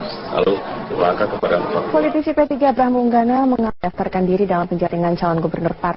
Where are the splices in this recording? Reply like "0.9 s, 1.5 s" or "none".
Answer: none